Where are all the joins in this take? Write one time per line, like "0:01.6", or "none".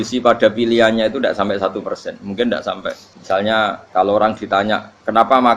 0:03.1
0:03.8